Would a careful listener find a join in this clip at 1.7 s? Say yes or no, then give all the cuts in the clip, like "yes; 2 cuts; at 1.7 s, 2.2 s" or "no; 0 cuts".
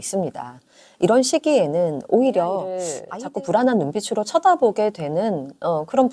no; 1 cut; at 3.0 s